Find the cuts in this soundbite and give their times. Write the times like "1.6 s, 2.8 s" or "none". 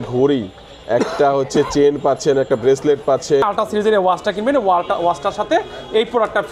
3.4 s